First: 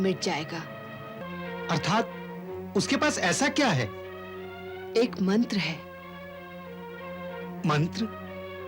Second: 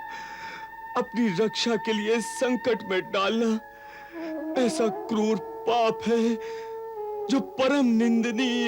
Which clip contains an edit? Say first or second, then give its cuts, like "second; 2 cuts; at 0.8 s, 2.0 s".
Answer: first; 1 cut; at 1.2 s